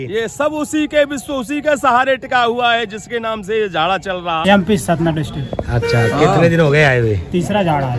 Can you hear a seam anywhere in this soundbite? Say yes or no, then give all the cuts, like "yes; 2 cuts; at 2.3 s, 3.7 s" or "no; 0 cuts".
yes; 1 cut; at 4.4 s